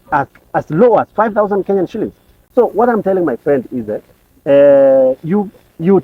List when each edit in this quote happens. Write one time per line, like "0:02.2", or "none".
none